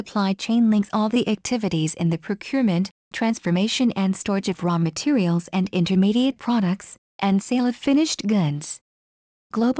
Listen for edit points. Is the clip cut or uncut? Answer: uncut